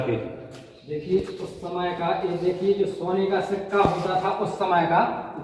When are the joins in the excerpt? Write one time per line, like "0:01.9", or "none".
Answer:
none